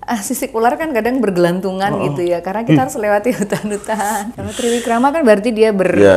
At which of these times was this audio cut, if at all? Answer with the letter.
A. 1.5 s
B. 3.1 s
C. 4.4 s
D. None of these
C